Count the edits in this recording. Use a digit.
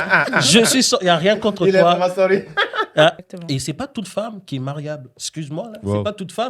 1